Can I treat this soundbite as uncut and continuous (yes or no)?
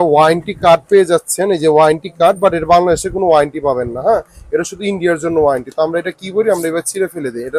yes